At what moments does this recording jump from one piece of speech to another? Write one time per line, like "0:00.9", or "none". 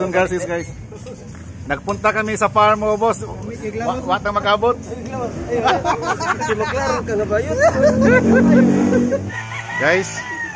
0:09.4